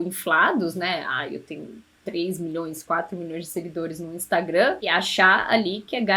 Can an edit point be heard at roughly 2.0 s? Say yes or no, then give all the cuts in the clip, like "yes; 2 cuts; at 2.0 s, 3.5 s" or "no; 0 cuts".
no; 1 cut; at 4.8 s